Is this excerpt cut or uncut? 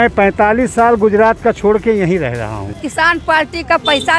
cut